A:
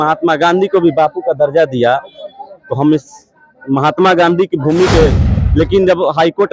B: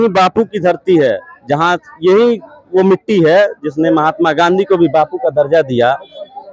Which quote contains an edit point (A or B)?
A